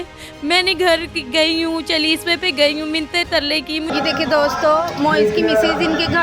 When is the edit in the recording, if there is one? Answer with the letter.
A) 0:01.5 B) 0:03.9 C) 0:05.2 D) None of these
B